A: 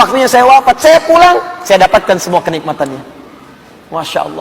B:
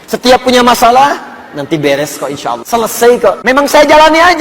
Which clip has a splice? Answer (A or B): B